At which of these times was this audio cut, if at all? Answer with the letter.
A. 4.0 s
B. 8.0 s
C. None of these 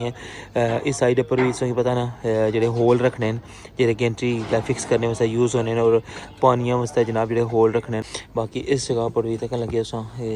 B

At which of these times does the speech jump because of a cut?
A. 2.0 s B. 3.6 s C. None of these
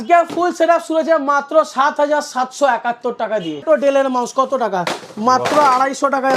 B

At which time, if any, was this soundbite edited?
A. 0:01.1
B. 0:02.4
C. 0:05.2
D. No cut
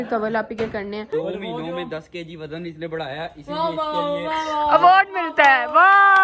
A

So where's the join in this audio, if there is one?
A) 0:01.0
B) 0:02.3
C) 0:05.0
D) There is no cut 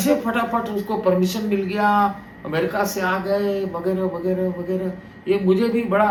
D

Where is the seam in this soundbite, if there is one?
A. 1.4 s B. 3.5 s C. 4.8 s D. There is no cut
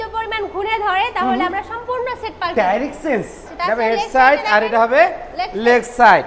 B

